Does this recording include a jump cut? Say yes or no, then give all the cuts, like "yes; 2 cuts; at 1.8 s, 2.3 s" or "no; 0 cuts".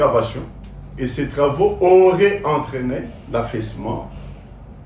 no; 0 cuts